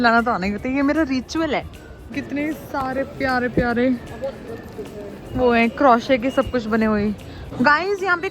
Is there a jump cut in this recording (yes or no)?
yes